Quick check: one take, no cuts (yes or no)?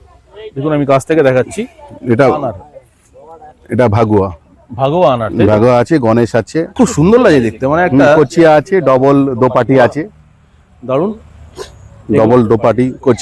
no